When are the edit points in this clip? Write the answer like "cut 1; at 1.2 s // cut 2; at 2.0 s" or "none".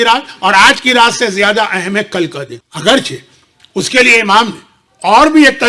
none